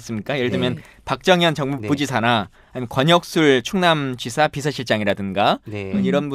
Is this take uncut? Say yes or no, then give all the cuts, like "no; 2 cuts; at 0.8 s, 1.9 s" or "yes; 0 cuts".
no; 1 cut; at 1.5 s